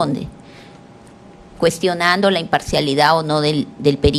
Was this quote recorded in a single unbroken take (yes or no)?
yes